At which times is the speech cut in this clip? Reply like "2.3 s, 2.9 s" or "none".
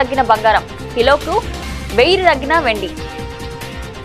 2.9 s